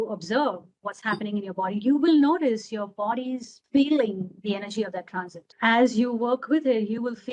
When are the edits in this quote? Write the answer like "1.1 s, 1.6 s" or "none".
3.5 s, 5.5 s